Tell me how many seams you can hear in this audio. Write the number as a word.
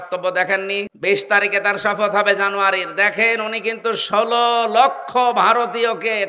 one